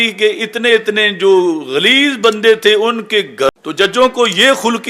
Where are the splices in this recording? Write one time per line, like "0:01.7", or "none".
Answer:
0:03.5

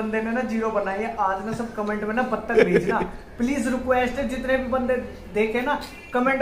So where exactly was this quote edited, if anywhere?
none

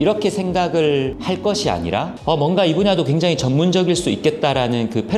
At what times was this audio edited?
0:01.2
0:02.1

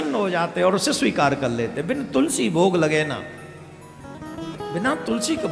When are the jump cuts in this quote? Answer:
none

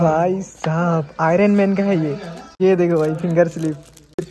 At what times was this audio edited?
0:02.5

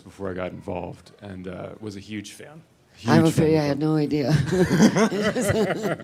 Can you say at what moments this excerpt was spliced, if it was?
none

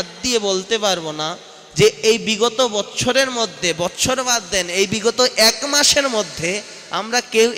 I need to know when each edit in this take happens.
none

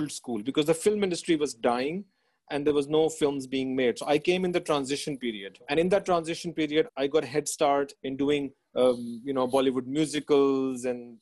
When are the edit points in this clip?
0:05.6
0:06.9
0:08.0

